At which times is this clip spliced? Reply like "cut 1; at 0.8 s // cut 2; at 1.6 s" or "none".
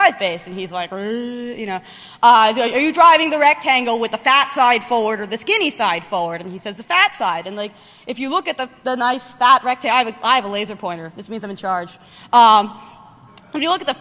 cut 1; at 8.2 s